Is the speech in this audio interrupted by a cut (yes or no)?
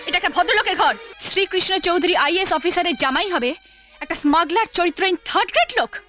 yes